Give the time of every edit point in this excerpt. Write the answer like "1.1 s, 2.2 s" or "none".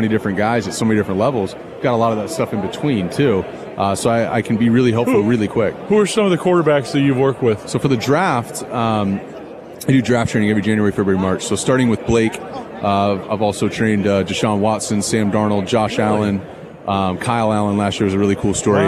none